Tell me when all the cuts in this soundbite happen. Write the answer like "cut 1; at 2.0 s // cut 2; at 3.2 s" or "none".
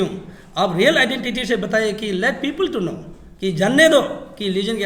none